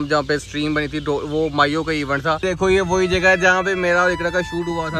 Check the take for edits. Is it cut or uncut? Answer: cut